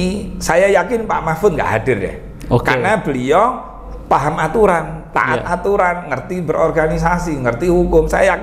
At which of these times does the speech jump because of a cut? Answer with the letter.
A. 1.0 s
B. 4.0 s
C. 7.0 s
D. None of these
D